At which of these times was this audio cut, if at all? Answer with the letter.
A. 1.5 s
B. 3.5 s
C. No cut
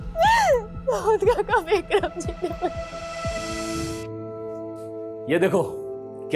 B